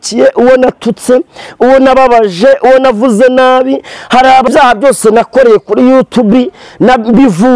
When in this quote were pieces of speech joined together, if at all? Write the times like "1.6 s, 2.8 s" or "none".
4.5 s